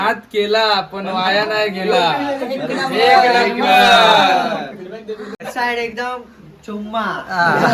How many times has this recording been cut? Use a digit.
0